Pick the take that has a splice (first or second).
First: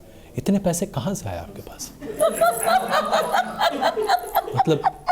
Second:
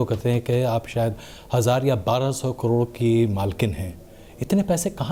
first